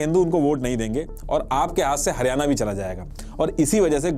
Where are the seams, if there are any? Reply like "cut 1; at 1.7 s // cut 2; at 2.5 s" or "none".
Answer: cut 1; at 3.0 s